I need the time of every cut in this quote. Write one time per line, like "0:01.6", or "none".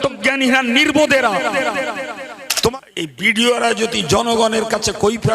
0:02.7